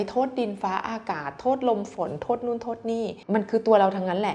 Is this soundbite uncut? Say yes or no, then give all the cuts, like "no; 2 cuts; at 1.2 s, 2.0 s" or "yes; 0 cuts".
no; 1 cut; at 3.2 s